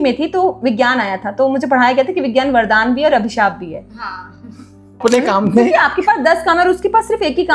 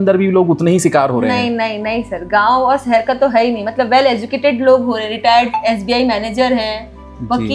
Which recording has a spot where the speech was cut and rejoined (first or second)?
first